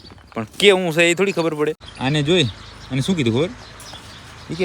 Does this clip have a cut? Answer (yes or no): yes